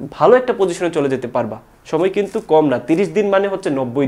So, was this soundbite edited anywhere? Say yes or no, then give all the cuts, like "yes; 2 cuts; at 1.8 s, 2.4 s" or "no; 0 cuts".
no; 0 cuts